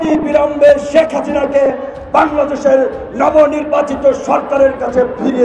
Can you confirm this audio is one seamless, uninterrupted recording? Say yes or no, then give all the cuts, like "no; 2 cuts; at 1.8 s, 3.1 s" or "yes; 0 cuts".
yes; 0 cuts